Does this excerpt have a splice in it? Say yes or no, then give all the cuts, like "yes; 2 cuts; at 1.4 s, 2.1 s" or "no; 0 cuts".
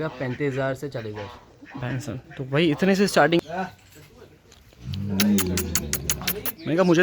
yes; 1 cut; at 3.4 s